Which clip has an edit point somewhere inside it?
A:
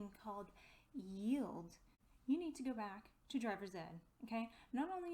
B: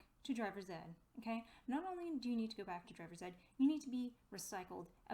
A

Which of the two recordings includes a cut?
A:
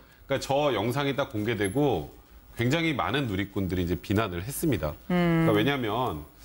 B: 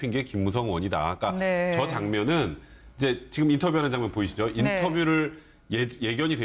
A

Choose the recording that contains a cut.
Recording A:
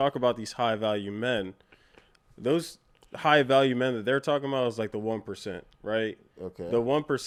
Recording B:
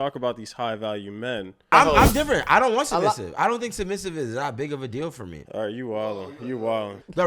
B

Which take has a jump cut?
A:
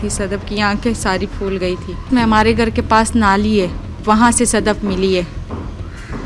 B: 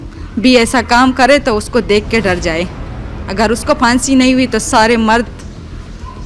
A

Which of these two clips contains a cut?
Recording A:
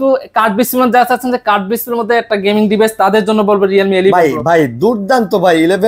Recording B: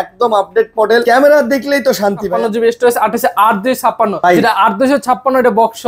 B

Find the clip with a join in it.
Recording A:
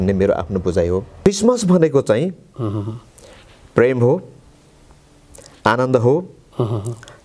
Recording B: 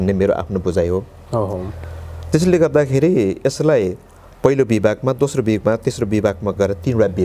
A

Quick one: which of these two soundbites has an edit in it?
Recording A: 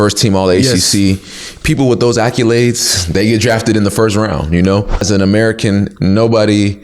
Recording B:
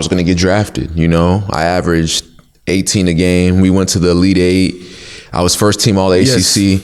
A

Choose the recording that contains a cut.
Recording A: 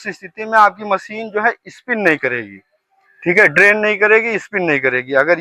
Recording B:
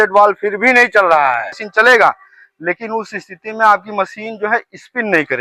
B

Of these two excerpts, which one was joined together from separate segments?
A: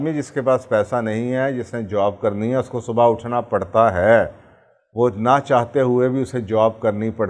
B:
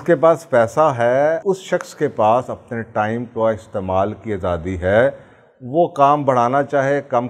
B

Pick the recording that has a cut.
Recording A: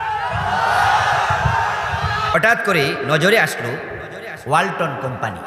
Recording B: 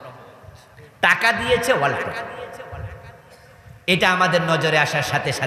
A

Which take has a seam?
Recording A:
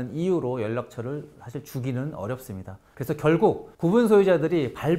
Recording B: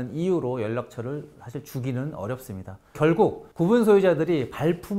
B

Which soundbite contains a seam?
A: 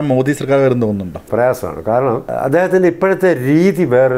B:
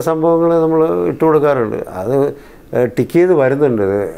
A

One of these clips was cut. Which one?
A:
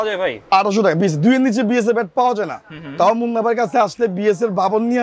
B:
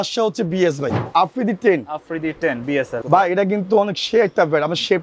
B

